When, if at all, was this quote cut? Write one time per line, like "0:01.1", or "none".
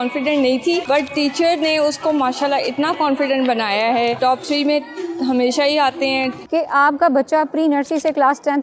0:00.8
0:04.2
0:06.5